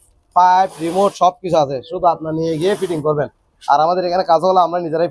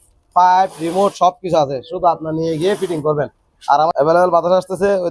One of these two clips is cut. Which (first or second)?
second